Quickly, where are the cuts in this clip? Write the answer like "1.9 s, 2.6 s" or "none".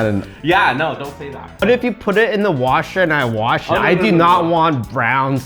1.6 s